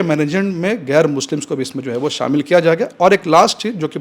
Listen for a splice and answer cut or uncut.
uncut